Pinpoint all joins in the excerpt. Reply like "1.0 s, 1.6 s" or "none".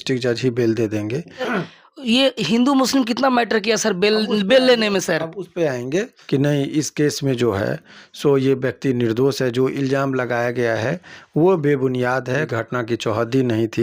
1.6 s, 6.2 s, 12.5 s